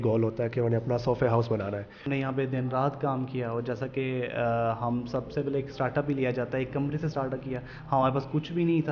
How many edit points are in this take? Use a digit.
1